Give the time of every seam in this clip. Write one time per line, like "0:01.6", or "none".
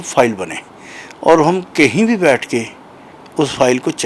none

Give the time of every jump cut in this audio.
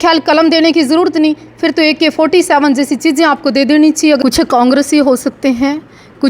0:04.2

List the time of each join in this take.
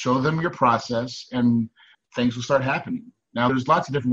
none

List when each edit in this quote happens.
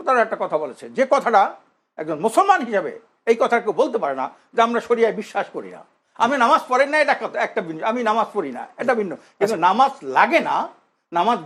none

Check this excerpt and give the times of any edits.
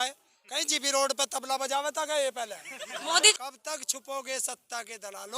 0:03.3

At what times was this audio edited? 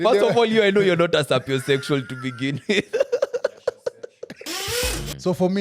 0:04.6

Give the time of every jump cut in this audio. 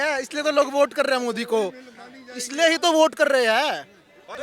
none

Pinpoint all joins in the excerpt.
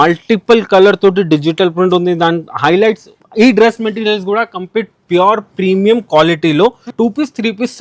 0:03.1
0:06.9

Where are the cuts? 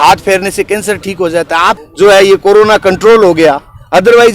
0:01.8

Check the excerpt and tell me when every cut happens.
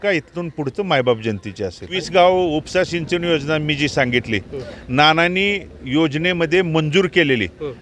0:02.0

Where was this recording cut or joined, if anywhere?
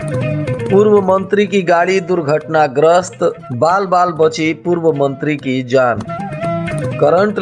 0:06.2

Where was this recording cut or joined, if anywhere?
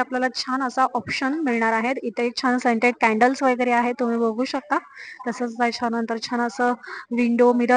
none

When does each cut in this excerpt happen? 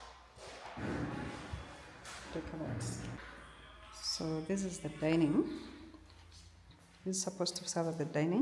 0:03.2

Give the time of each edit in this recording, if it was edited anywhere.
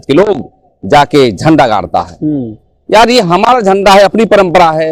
none

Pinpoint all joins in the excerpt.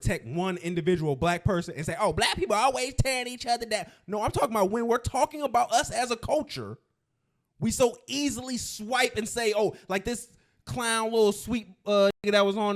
none

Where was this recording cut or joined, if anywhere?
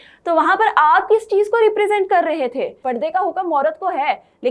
0:02.8

